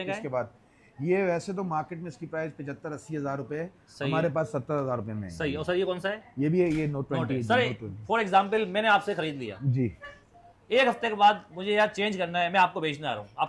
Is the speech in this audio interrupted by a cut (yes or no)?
no